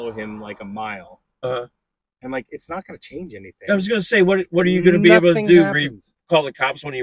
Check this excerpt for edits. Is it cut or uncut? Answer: uncut